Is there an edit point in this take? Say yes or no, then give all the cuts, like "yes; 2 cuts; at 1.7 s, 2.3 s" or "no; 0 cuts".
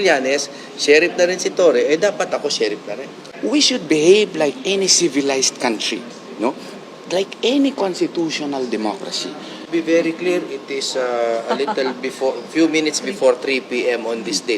yes; 2 cuts; at 3.2 s, 9.7 s